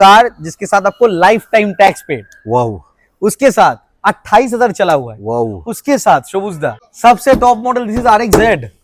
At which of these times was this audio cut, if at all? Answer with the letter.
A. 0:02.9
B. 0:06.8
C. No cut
B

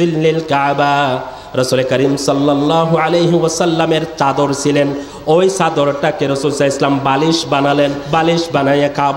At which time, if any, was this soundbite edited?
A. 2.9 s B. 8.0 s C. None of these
B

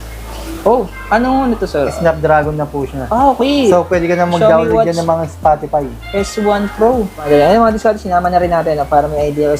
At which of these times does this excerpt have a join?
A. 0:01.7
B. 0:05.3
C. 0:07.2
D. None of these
C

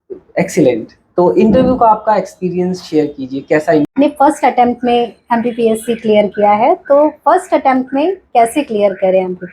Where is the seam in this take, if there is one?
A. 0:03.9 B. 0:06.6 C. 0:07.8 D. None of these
A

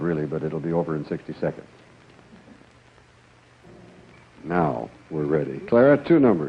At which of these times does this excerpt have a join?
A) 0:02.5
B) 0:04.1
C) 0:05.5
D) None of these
D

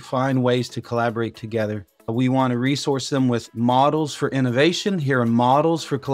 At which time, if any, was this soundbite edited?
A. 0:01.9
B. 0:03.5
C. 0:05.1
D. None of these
A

